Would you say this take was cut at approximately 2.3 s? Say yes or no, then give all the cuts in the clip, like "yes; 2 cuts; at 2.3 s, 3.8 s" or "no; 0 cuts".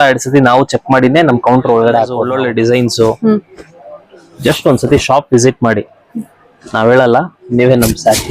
yes; 1 cut; at 2.3 s